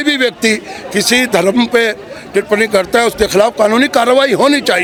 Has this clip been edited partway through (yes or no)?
no